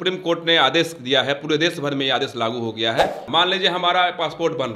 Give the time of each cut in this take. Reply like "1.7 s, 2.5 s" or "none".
3.2 s